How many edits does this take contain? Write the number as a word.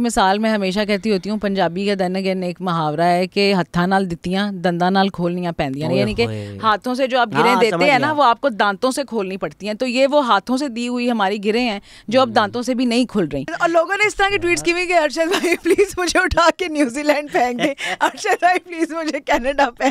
one